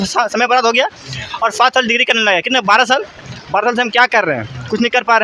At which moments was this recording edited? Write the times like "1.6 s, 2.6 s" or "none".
none